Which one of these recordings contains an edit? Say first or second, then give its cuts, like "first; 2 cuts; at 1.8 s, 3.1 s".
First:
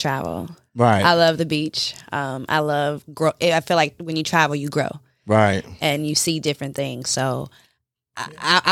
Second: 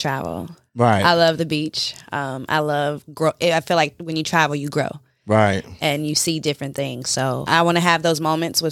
second; 1 cut; at 7.4 s